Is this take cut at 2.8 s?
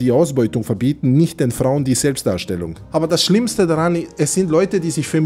yes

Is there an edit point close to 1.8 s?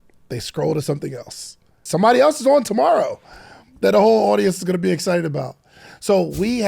yes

